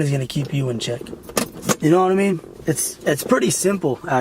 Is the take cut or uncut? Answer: cut